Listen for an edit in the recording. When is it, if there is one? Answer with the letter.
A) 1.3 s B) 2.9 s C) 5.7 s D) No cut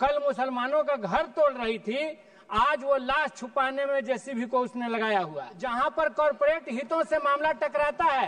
C